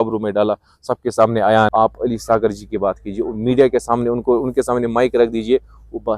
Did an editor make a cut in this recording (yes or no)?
yes